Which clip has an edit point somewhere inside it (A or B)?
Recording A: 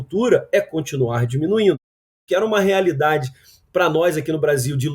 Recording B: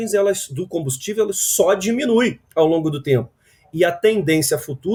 A